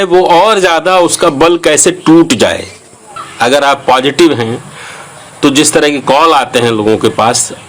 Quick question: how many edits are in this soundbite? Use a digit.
1